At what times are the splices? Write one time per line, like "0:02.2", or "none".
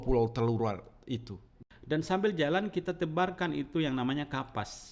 0:01.5